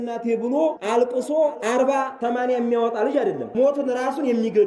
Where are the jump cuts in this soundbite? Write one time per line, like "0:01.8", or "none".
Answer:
0:00.8
0:01.9
0:03.4